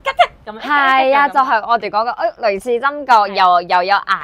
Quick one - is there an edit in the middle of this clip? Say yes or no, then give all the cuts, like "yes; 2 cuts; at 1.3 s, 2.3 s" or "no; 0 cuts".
no; 0 cuts